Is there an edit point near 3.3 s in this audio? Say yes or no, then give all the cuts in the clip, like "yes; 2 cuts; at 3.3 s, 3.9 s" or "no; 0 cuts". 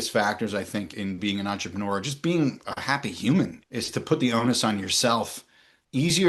no; 1 cut; at 0.9 s